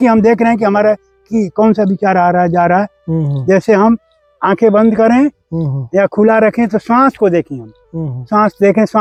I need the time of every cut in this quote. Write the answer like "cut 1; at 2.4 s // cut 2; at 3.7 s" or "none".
none